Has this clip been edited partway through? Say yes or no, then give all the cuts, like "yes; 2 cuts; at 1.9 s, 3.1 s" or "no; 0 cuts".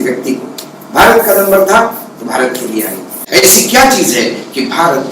yes; 1 cut; at 3.1 s